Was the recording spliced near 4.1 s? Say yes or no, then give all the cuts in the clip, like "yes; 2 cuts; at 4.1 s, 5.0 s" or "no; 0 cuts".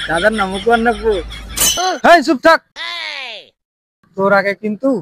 no; 1 cut; at 1.8 s